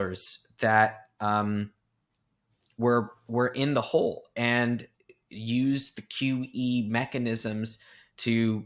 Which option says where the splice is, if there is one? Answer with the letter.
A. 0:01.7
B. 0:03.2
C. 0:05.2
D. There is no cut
D